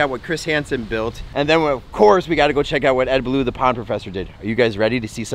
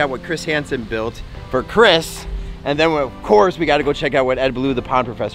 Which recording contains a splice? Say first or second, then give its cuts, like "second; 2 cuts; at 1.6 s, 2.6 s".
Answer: first; 1 cut; at 1.2 s